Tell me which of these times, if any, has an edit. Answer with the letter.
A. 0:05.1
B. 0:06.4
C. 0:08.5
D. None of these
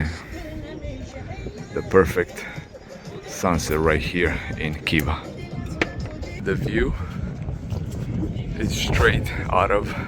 B